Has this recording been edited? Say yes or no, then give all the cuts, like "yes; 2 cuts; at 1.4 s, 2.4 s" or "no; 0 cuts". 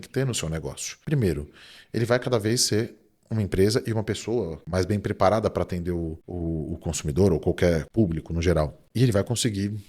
yes; 5 cuts; at 0.9 s, 4.6 s, 6.3 s, 7.9 s, 8.8 s